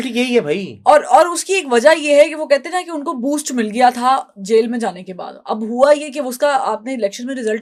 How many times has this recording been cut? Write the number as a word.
zero